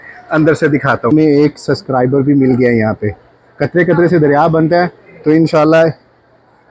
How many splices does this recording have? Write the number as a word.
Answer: one